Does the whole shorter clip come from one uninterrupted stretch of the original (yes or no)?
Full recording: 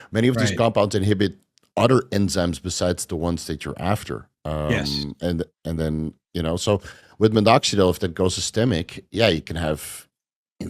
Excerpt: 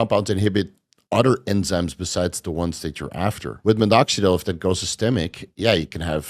no